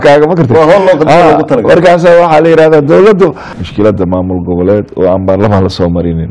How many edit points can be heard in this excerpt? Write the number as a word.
one